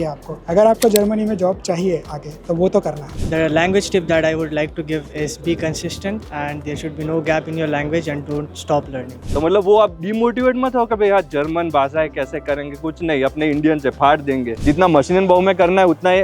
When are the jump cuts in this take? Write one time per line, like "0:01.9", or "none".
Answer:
0:03.2
0:09.2
0:14.6

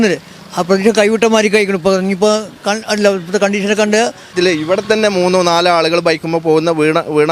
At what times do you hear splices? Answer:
0:04.3

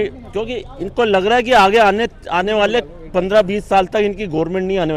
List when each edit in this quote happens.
none

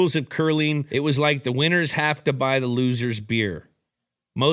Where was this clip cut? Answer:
none

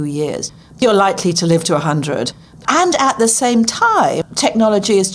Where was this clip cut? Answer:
0:00.8
0:02.6
0:04.2

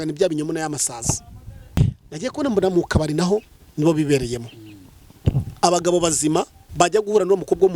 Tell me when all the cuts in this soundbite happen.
0:01.8
0:06.6

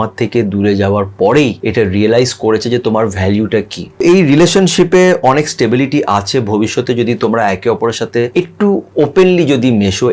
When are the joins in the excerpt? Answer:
0:01.6
0:04.0
0:08.3

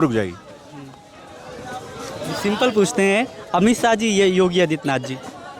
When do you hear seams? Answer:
none

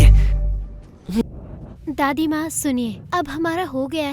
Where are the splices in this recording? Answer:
0:01.2

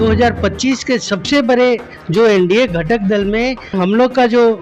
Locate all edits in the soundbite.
0:01.9
0:03.8

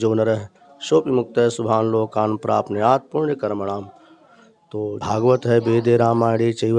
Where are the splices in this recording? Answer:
0:05.0

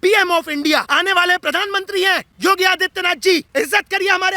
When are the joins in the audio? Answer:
0:00.9
0:02.3
0:03.5

